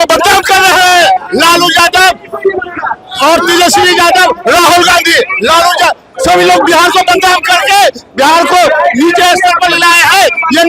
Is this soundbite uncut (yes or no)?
yes